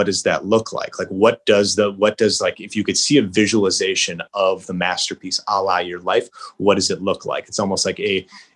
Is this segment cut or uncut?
uncut